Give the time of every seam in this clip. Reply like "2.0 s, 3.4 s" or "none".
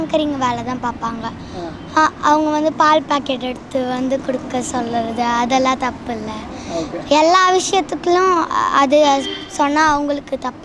none